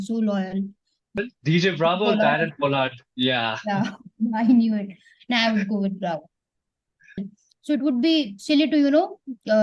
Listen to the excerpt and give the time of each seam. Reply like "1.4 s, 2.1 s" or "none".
1.1 s, 7.2 s